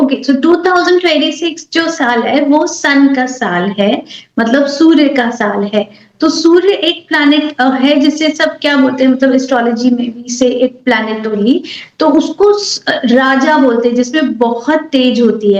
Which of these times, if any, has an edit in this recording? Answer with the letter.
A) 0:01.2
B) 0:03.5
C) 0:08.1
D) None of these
D